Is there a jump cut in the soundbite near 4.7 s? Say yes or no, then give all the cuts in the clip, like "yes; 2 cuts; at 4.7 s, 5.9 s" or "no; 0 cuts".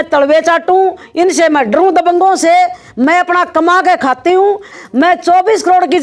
yes; 1 cut; at 4.7 s